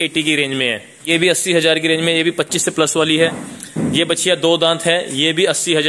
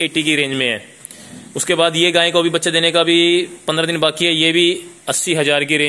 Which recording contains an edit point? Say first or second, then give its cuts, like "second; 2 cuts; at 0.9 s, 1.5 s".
first; 1 cut; at 1.1 s